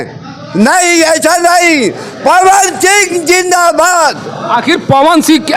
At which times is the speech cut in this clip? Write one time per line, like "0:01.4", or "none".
none